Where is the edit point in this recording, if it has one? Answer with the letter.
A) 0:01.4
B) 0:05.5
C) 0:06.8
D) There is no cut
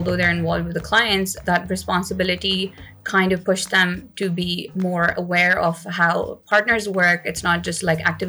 A